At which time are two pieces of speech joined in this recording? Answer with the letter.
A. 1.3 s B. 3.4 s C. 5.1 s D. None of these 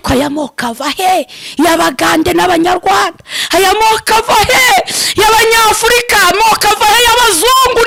D